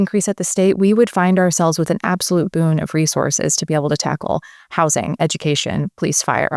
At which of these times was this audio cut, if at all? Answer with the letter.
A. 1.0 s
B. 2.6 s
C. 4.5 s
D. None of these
D